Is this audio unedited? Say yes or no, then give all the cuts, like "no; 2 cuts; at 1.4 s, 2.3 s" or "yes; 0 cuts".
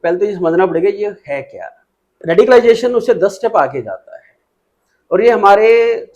no; 1 cut; at 2.2 s